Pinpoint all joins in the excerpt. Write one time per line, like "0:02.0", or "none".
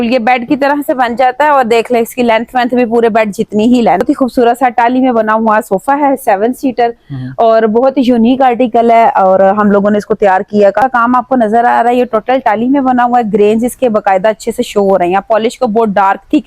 0:04.0
0:10.8